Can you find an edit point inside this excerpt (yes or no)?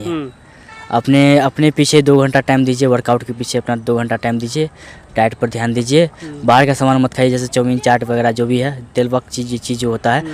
no